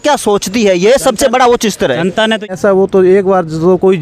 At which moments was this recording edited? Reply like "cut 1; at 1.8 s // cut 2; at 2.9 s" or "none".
cut 1; at 2.5 s